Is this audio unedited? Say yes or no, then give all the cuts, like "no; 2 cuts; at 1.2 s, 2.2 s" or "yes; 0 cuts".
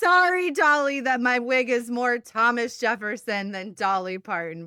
yes; 0 cuts